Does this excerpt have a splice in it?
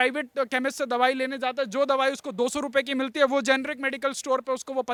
no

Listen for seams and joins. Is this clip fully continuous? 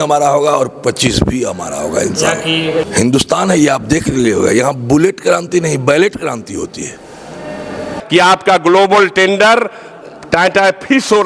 no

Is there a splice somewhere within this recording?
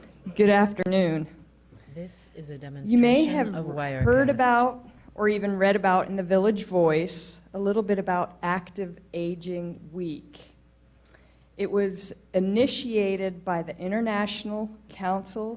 yes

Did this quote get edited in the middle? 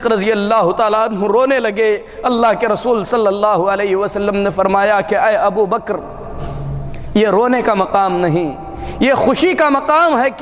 no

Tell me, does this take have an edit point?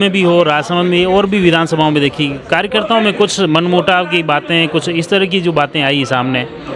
no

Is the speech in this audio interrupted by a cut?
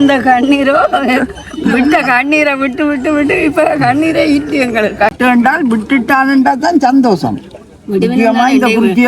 yes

